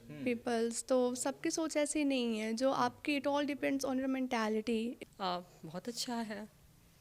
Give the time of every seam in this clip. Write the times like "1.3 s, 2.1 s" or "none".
5.0 s